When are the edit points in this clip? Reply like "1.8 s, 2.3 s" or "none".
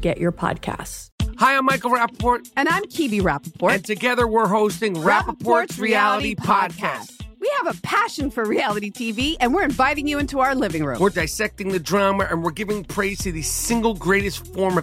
1.0 s

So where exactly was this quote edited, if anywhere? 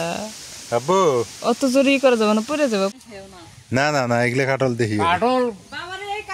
3.0 s

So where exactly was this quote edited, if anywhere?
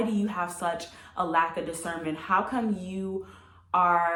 none

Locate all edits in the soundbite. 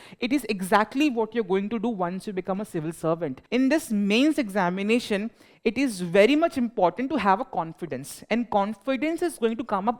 3.4 s

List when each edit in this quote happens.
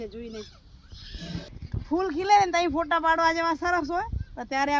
1.5 s

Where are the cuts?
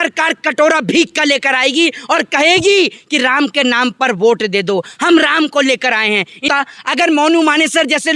6.4 s

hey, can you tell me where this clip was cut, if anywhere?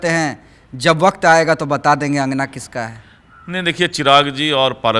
none

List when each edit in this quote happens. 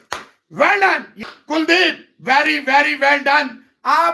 1.1 s

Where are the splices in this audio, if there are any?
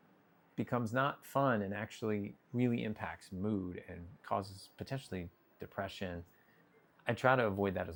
none

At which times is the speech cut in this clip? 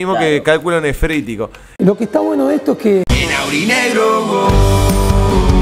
1.6 s

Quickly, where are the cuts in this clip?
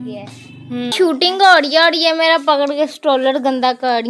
0.9 s

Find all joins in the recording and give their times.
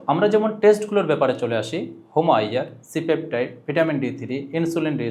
none

